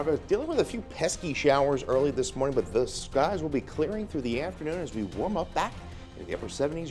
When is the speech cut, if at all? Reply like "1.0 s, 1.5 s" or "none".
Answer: none